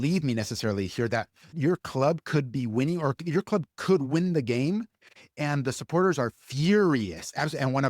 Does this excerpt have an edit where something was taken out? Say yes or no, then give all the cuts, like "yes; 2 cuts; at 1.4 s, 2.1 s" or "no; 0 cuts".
yes; 1 cut; at 1.5 s